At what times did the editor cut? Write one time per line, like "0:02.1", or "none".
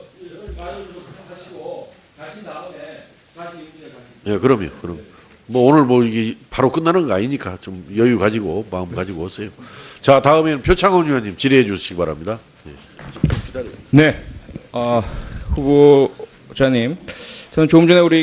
0:14.2